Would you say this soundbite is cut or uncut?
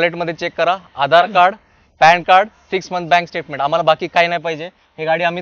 uncut